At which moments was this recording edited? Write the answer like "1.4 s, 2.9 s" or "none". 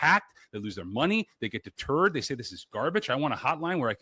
none